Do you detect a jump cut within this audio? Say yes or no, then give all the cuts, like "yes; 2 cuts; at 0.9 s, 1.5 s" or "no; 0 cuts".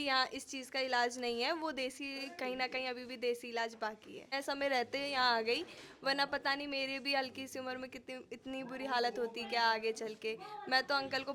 yes; 1 cut; at 4.3 s